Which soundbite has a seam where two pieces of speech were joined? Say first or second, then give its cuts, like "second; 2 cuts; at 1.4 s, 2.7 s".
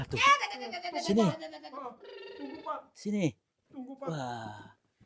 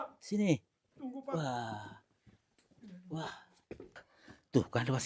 second; 1 cut; at 4.0 s